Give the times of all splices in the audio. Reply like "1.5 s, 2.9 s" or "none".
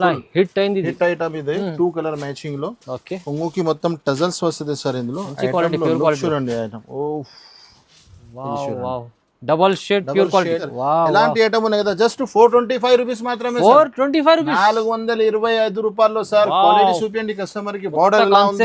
10.7 s